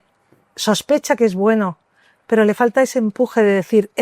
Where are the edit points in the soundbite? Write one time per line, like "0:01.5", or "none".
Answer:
none